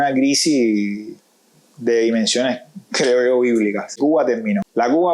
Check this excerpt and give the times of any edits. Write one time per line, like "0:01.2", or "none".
0:04.0